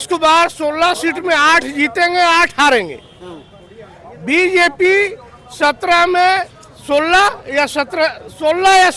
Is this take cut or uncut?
uncut